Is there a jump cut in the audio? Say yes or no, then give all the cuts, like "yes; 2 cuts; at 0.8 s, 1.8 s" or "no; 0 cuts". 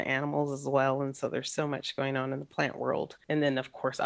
yes; 1 cut; at 3.2 s